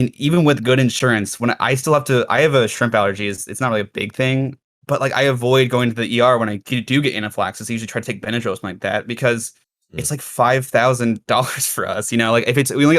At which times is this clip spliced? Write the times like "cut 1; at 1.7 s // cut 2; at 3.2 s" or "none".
cut 1; at 4.7 s